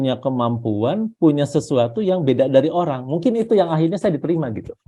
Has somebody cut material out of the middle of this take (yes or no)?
no